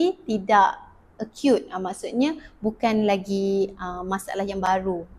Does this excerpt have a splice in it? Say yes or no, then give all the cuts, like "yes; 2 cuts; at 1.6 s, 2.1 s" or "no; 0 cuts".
no; 0 cuts